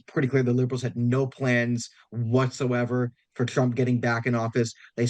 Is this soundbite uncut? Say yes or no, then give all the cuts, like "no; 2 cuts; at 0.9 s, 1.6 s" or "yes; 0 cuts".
yes; 0 cuts